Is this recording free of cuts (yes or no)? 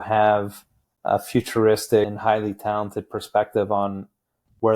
no